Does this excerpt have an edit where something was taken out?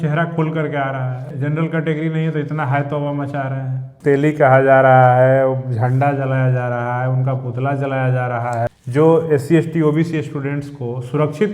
yes; 3 cuts; at 1.2 s, 3.8 s, 8.7 s

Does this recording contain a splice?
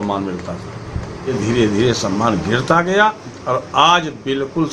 yes; 1 cut; at 1.4 s

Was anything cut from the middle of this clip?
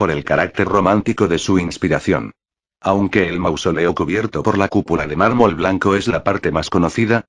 yes; 1 cut; at 4.4 s

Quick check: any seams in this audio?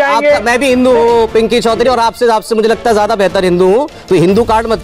no; 0 cuts

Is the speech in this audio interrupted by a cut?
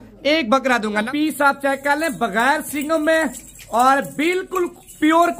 yes; 1 cut; at 1.1 s

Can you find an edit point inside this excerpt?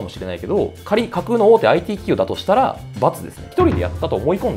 yes; 1 cut; at 3.5 s

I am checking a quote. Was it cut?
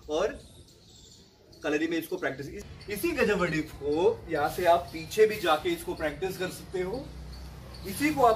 no; 0 cuts

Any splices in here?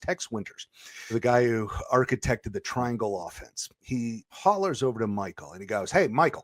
yes; 2 cuts; at 1.1 s, 4.3 s

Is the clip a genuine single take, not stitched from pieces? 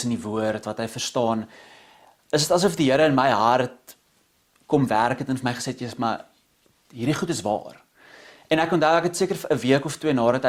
yes; 0 cuts

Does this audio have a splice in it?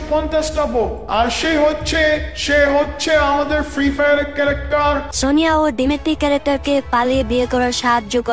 yes; 1 cut; at 5.1 s

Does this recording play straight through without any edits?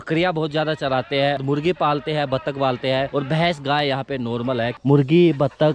no; 3 cuts; at 1.4 s, 3.1 s, 4.7 s

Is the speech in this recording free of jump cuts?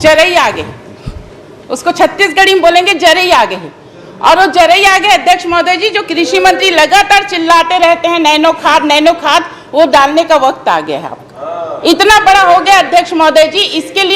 yes; 0 cuts

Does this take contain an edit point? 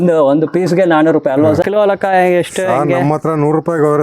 yes; 1 cut; at 1.6 s

